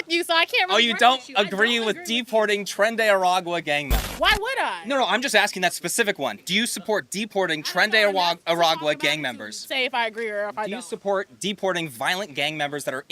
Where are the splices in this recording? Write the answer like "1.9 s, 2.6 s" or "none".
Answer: 4.0 s